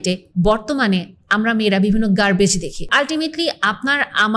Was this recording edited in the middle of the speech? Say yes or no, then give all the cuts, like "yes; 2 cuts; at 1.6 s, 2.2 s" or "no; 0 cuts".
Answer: yes; 1 cut; at 2.9 s